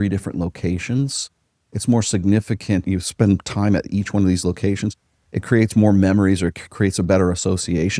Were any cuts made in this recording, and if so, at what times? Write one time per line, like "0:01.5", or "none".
0:02.8